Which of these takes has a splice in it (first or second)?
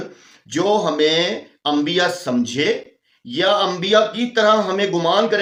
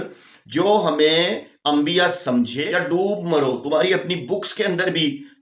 second